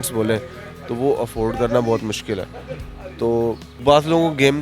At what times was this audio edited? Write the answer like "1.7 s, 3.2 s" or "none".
3.7 s